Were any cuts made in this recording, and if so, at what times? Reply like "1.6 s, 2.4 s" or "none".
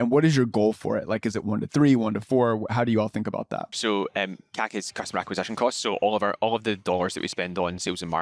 3.7 s, 6.8 s